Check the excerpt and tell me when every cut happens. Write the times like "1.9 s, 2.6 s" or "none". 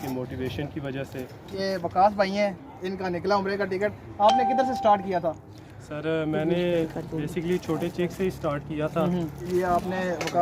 1.5 s, 9.5 s